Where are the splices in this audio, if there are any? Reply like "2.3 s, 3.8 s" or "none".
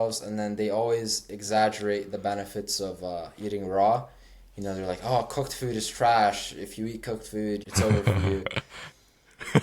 7.6 s

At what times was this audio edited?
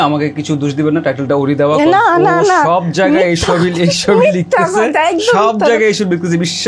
none

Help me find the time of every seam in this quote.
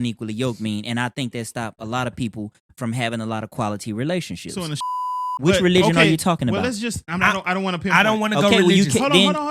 4.8 s

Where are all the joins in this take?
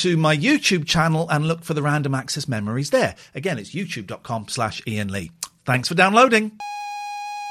6.6 s

